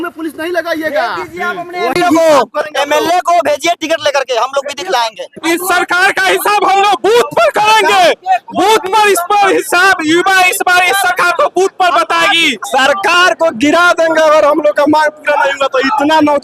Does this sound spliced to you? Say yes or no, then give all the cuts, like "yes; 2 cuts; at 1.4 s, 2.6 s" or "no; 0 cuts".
yes; 2 cuts; at 5.3 s, 12.5 s